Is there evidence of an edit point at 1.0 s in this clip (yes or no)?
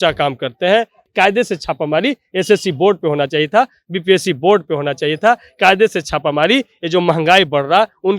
yes